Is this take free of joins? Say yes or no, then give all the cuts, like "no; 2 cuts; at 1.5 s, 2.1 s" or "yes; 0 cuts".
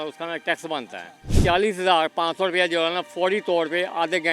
no; 1 cut; at 1.4 s